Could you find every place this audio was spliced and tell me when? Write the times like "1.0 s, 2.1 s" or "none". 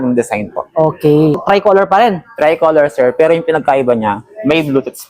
1.4 s